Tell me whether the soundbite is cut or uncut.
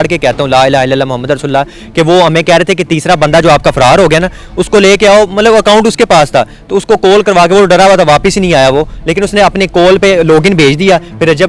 uncut